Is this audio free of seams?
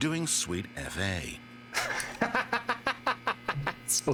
yes; 0 cuts

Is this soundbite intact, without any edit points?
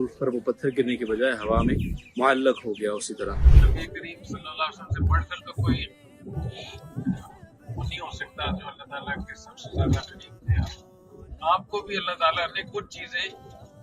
no; 1 cut; at 3.5 s

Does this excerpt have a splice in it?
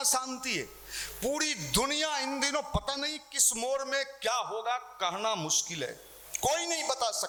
no; 0 cuts

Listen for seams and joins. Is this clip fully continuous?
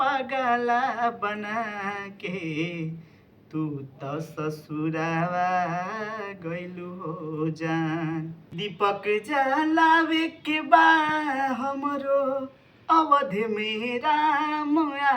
no; 1 cut; at 8.6 s

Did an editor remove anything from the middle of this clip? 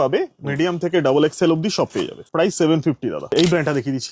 yes; 2 cuts; at 2.2 s, 3.2 s

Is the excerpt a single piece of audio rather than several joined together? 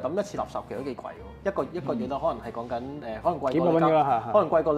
no; 1 cut; at 1.3 s

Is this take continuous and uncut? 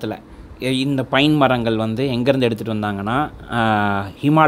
yes; 0 cuts

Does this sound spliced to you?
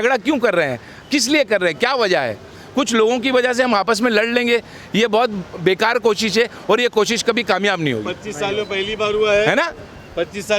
no; 0 cuts

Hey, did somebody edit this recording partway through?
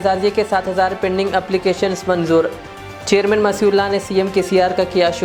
no; 0 cuts

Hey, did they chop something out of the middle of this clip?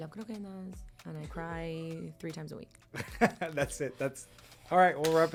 no; 0 cuts

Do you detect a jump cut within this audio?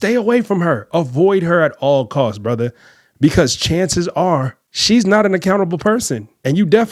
no; 0 cuts

